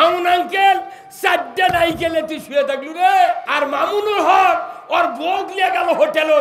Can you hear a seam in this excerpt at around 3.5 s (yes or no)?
yes